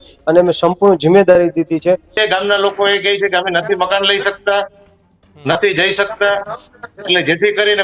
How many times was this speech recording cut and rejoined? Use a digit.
1